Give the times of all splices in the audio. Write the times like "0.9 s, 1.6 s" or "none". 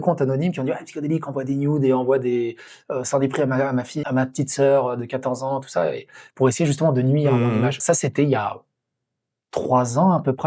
4.0 s, 7.8 s

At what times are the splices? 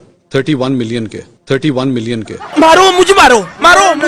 2.0 s

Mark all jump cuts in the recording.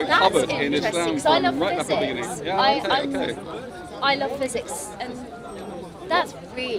none

